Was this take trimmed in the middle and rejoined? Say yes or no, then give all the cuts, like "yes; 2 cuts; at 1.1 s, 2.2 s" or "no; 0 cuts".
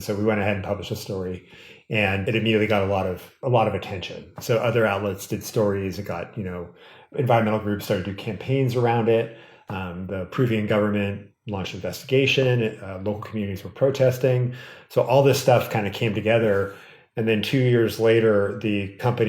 yes; 3 cuts; at 2.2 s, 3.3 s, 7.1 s